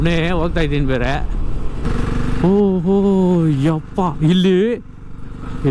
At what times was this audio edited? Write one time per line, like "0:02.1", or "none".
0:01.9